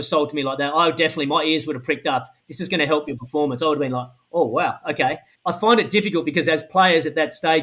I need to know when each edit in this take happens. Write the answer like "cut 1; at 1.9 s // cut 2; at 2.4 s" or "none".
cut 1; at 5.3 s